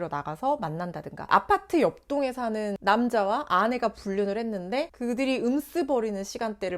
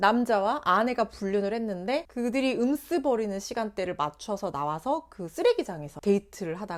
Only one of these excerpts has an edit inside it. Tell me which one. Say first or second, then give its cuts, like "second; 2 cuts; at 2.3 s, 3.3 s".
first; 1 cut; at 1.2 s